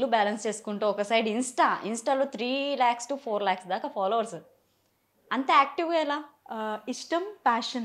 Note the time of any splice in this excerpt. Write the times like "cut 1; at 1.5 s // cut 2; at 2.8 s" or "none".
none